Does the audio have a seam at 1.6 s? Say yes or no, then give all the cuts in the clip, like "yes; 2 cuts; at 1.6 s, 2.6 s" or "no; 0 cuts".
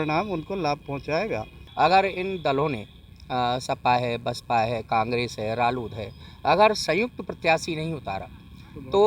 yes; 1 cut; at 1.6 s